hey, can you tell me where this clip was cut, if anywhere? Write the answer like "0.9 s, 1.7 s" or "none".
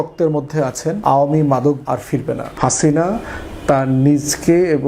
1.0 s, 1.9 s